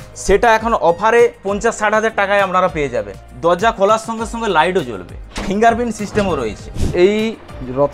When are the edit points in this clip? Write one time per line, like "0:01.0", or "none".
0:01.4
0:03.1
0:05.1
0:06.9